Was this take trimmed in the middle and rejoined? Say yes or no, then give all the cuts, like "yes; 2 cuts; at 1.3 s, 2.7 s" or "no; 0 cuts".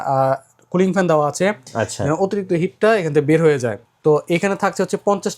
yes; 1 cut; at 3.8 s